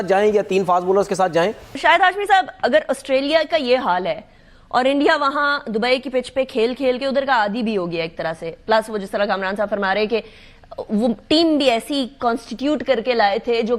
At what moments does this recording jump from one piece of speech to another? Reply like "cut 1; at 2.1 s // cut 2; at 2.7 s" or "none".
cut 1; at 1.7 s